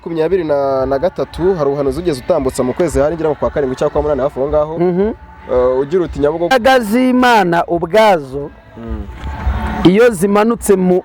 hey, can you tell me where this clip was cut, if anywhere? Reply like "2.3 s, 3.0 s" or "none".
6.5 s

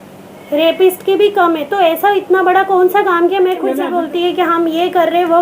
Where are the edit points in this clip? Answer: 3.8 s

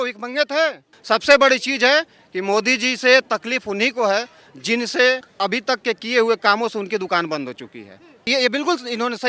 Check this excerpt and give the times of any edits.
0.9 s, 5.3 s, 8.2 s

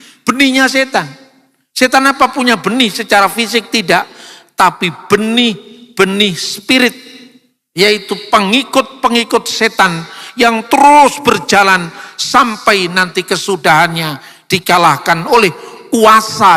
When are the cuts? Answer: none

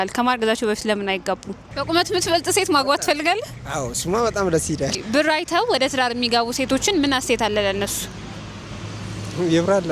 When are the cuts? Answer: 1.6 s, 5.0 s

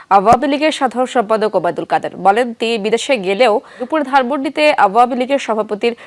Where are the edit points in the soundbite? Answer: 3.9 s

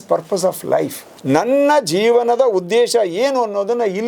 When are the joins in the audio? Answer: 1.1 s

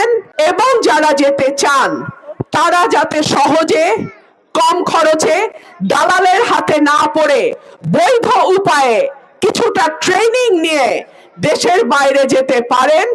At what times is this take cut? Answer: none

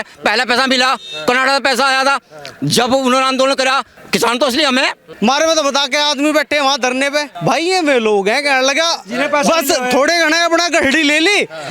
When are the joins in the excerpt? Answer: 3.9 s, 5.0 s, 7.3 s

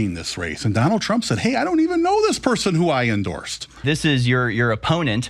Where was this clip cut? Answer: 3.8 s

